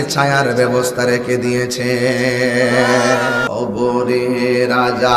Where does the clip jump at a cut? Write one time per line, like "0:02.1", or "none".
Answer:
0:03.5

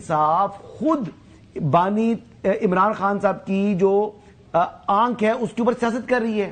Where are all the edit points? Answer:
none

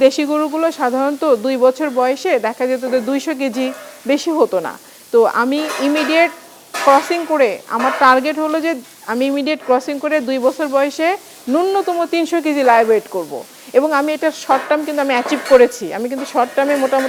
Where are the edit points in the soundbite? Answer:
none

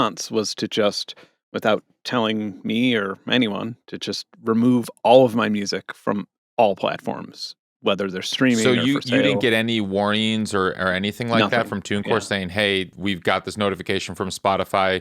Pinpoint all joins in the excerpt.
0:12.9

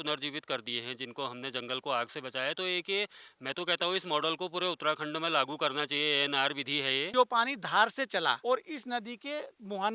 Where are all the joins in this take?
0:07.1
0:08.4

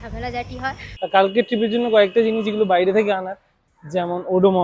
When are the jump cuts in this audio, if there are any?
0:00.9

